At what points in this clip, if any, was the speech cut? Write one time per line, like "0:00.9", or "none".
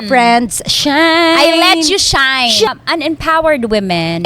0:02.7